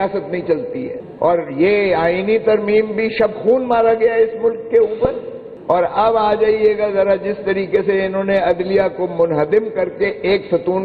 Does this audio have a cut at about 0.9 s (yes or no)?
yes